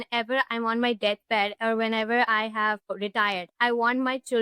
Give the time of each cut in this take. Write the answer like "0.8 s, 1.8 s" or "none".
3.0 s